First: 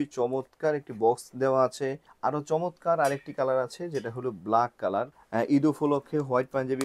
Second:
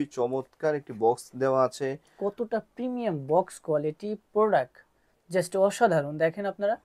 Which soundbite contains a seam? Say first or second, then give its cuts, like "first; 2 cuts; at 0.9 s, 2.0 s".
first; 2 cuts; at 2.0 s, 5.2 s